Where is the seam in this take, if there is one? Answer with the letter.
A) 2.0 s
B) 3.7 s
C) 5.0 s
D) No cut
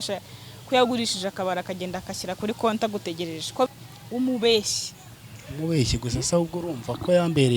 B